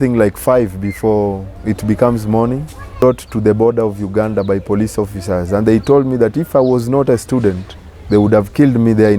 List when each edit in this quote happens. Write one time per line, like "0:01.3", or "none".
0:03.0